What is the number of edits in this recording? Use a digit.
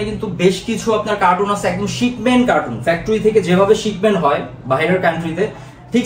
0